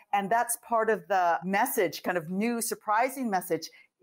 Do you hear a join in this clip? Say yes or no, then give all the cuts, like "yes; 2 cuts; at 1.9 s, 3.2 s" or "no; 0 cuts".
yes; 1 cut; at 1.4 s